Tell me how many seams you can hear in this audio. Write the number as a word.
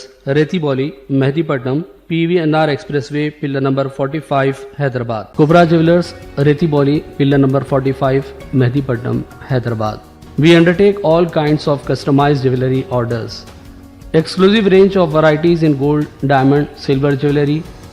zero